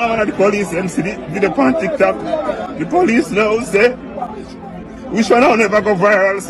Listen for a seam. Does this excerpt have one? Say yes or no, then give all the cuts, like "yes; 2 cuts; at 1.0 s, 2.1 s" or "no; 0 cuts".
no; 0 cuts